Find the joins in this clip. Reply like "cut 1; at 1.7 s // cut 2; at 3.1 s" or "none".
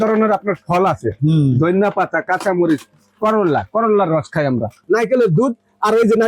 cut 1; at 4.7 s

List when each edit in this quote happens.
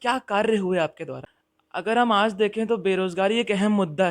cut 1; at 1.3 s

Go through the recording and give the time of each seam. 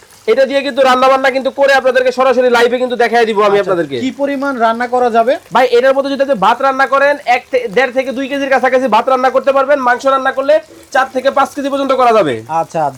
none

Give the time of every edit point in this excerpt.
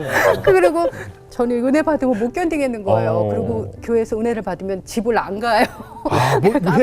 cut 1; at 1.1 s

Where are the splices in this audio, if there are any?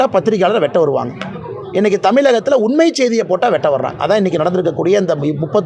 none

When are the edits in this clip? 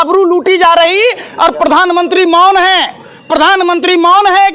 none

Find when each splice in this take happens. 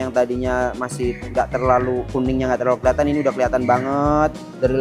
none

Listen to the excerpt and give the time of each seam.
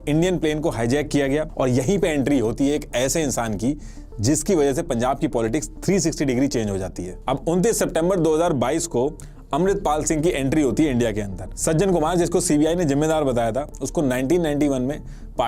cut 1; at 1.5 s // cut 2; at 7.1 s // cut 3; at 11.5 s

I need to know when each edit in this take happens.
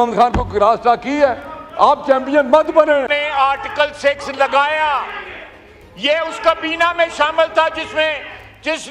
cut 1; at 3.1 s

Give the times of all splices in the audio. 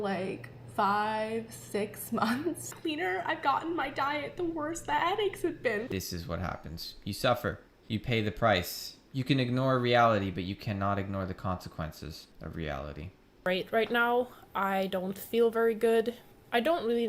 cut 1; at 2.7 s // cut 2; at 5.9 s // cut 3; at 7.7 s // cut 4; at 12.3 s // cut 5; at 13.5 s

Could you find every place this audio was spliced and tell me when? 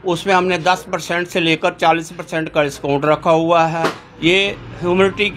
cut 1; at 4.1 s

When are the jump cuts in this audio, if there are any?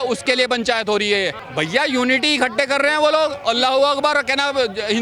cut 1; at 1.4 s

